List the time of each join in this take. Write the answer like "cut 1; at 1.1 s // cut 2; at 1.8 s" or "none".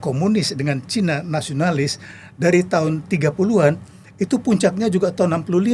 none